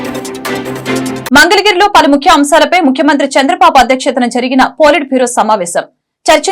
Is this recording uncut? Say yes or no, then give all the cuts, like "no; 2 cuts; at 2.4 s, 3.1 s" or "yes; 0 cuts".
no; 1 cut; at 1.2 s